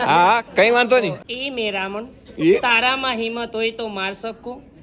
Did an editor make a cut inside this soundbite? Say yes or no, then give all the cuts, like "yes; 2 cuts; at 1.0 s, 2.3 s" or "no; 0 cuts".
yes; 1 cut; at 1.2 s